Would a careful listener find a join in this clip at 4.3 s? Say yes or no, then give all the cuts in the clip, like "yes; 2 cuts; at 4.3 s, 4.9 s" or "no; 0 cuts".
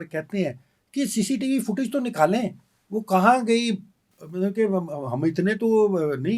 no; 0 cuts